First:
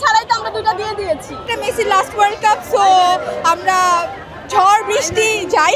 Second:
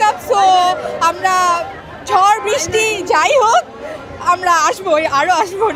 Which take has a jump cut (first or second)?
first